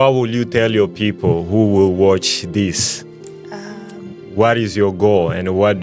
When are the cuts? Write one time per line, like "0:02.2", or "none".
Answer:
none